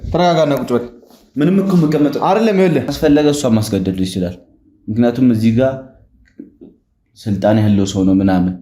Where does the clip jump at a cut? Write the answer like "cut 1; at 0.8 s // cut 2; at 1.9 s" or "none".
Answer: cut 1; at 2.9 s